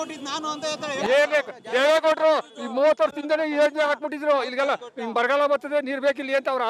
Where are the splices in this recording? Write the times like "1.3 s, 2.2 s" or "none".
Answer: none